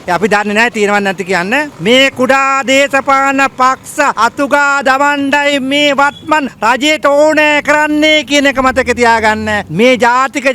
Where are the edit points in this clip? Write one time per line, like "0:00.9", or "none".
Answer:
0:01.7